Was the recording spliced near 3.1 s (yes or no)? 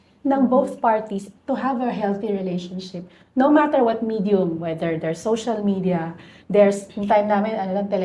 no